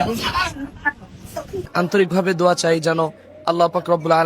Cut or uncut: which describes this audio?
cut